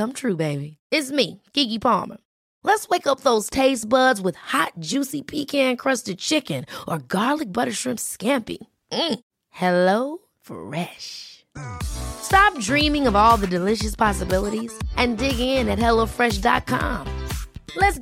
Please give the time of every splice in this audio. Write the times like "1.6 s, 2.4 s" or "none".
none